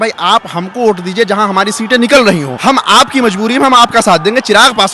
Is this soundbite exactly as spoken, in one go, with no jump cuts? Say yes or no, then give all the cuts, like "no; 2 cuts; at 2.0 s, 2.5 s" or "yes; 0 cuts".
no; 1 cut; at 2.5 s